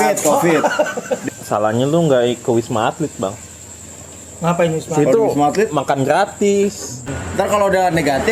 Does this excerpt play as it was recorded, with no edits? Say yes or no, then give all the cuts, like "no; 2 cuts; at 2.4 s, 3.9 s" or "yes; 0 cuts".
no; 2 cuts; at 1.2 s, 7.0 s